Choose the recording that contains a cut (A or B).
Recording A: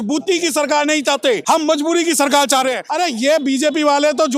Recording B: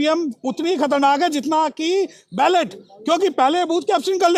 A